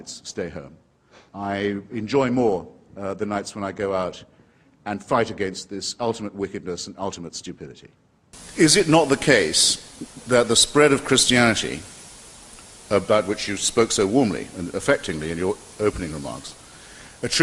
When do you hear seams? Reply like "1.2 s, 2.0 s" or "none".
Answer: 6.5 s